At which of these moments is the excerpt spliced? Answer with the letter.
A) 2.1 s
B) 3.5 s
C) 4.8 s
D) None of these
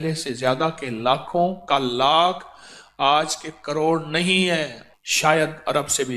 C